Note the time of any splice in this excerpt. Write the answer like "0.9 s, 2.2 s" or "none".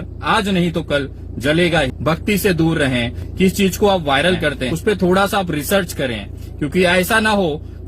2.0 s, 3.2 s, 4.7 s